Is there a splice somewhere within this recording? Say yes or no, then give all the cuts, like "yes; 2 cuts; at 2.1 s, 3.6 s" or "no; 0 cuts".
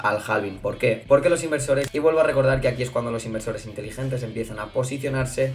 yes; 1 cut; at 1.9 s